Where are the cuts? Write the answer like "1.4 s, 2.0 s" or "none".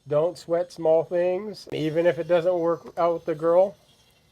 1.8 s